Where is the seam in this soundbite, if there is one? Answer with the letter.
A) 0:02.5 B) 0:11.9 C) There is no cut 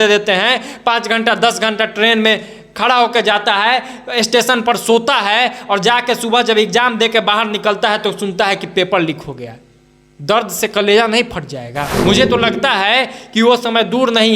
B